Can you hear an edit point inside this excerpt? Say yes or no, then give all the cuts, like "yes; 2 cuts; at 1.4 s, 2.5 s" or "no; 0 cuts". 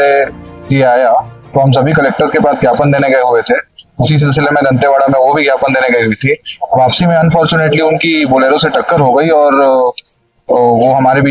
no; 0 cuts